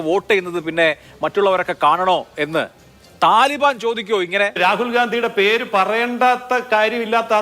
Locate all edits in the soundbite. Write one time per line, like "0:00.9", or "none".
0:04.6